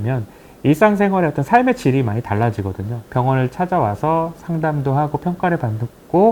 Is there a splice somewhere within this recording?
yes; 1 cut; at 3.0 s

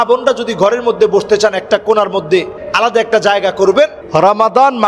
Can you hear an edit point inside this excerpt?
yes; 2 cuts; at 2.6 s, 4.0 s

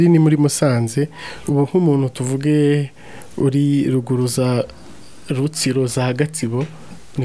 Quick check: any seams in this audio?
no; 0 cuts

